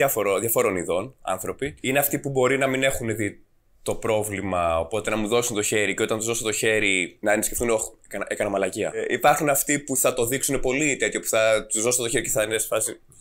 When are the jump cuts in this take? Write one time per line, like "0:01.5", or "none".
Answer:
0:01.8
0:07.1
0:09.0